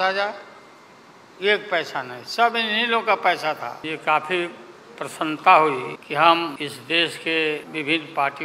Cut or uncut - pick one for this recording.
cut